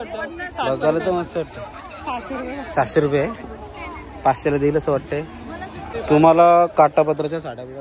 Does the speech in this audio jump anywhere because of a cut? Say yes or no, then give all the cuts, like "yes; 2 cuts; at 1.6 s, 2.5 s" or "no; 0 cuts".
yes; 1 cut; at 5.9 s